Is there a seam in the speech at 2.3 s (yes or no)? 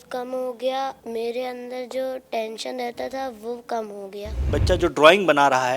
no